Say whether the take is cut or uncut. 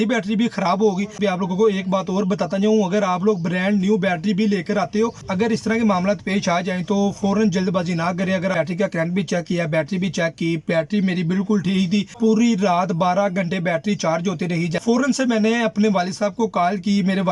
cut